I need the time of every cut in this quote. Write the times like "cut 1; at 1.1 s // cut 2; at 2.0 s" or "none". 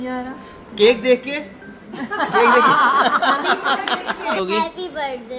cut 1; at 4.5 s